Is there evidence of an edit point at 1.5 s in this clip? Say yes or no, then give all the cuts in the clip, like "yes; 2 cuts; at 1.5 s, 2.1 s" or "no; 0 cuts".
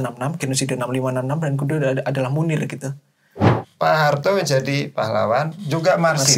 no; 1 cut; at 3.5 s